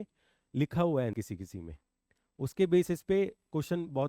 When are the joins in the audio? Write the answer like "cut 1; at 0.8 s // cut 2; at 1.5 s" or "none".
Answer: cut 1; at 1.1 s